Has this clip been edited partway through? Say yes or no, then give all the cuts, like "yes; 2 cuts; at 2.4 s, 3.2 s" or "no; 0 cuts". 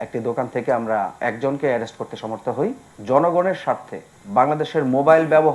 yes; 1 cut; at 2.8 s